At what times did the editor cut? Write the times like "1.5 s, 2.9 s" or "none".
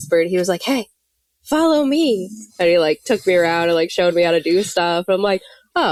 none